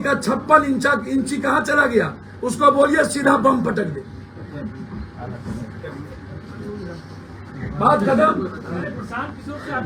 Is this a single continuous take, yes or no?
yes